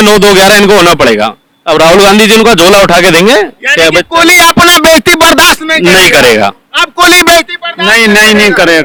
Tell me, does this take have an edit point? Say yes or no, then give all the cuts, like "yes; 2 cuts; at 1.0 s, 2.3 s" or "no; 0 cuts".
no; 0 cuts